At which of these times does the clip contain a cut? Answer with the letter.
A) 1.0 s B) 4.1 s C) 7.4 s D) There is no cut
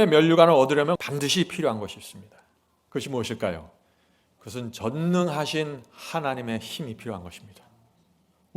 A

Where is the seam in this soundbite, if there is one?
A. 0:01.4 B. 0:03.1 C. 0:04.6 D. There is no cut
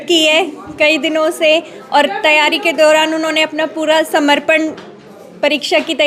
D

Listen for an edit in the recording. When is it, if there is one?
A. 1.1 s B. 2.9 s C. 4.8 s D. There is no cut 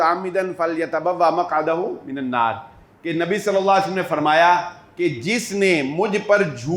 D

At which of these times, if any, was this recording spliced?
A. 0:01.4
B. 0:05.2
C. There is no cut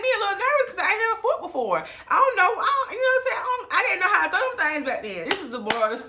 B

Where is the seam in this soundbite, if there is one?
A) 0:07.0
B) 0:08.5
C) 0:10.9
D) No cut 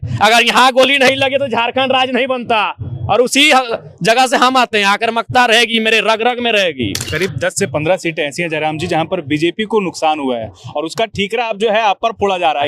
A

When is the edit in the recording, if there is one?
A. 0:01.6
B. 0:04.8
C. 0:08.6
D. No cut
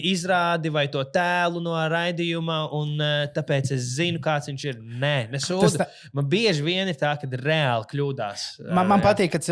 D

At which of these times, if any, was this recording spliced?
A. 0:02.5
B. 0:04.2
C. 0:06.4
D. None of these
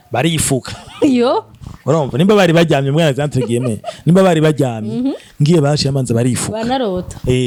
D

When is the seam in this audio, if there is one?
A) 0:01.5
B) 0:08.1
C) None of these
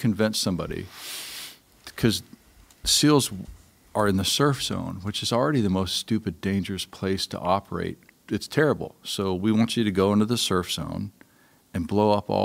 B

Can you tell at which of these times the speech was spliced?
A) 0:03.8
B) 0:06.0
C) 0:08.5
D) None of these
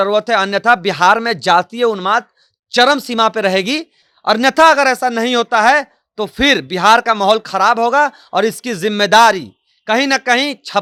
D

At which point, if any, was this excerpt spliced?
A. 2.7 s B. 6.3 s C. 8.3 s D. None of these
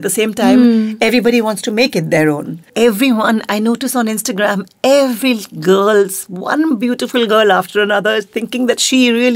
A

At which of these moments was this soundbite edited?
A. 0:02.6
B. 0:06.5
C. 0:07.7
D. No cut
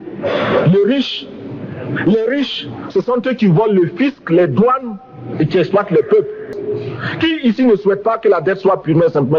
B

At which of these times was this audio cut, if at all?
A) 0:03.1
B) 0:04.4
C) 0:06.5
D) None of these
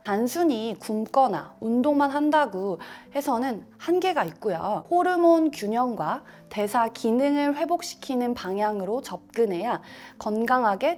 D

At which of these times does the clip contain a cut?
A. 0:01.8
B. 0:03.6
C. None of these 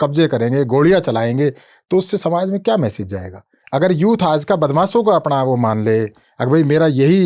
B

